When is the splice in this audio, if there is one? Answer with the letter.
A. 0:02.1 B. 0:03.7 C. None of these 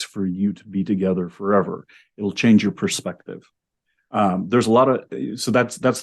C